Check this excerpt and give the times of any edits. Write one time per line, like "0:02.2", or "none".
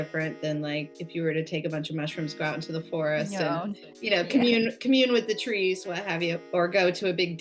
none